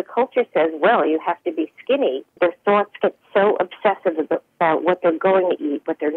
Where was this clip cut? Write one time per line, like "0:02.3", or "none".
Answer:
0:02.3